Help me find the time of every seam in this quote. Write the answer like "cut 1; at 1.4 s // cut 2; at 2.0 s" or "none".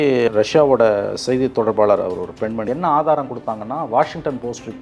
cut 1; at 2.6 s